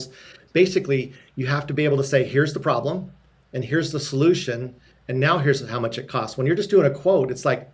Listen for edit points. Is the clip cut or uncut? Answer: uncut